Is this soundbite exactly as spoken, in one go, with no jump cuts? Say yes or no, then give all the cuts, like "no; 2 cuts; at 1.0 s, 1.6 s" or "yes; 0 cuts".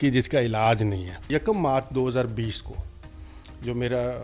yes; 0 cuts